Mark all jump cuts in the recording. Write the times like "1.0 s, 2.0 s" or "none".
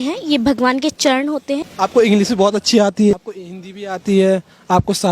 1.7 s, 3.1 s